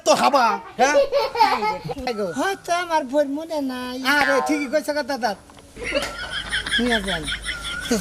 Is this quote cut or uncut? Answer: cut